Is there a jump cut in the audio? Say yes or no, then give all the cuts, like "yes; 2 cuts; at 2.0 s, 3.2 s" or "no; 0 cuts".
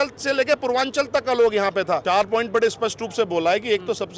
yes; 1 cut; at 2.0 s